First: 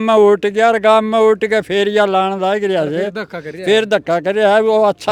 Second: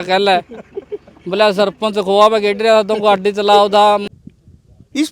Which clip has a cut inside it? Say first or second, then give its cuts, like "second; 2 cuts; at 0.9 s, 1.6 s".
second; 1 cut; at 4.0 s